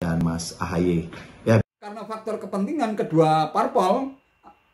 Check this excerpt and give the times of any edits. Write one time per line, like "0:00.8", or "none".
0:01.6